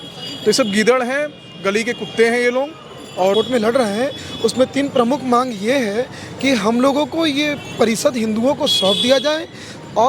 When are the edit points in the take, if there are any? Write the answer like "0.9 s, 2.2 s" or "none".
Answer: 3.3 s